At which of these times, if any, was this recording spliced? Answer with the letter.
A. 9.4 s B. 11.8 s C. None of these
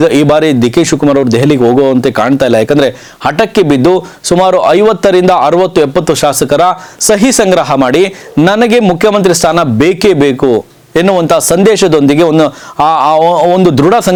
C